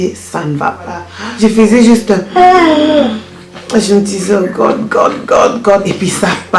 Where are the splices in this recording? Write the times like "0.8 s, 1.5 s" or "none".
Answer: 1.2 s